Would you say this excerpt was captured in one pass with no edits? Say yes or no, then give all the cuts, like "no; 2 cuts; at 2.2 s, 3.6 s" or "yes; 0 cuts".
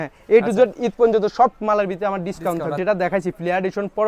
no; 1 cut; at 2.8 s